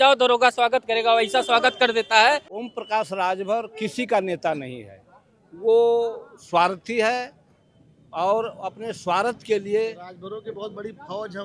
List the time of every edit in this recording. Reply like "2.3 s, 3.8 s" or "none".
2.6 s

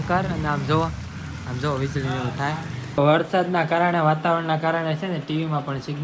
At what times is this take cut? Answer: 3.0 s

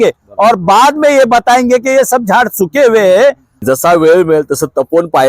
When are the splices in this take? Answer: 3.5 s

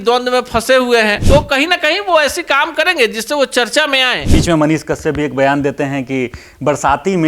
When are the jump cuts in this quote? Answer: 1.2 s, 4.2 s

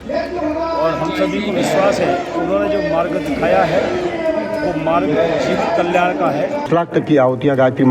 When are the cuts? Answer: 6.7 s

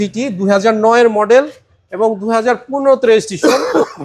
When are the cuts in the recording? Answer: none

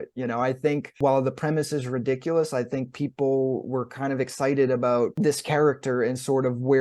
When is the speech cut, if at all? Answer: 0.9 s, 5.1 s

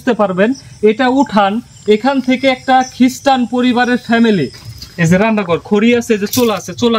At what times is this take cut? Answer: 4.7 s

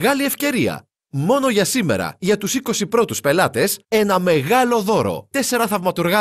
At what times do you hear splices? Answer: 5.3 s

